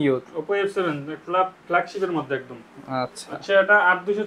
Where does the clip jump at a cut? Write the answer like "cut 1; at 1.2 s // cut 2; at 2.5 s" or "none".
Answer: none